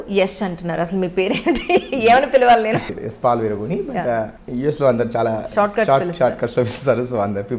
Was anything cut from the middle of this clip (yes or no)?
yes